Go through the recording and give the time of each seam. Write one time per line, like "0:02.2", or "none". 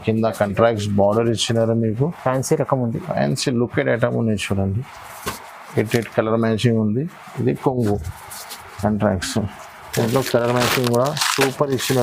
none